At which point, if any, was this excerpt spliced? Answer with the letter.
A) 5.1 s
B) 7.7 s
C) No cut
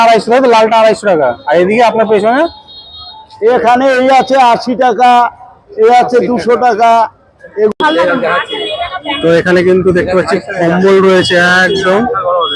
B